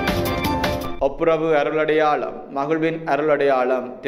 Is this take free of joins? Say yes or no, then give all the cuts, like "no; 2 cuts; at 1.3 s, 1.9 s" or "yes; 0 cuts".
no; 1 cut; at 1.0 s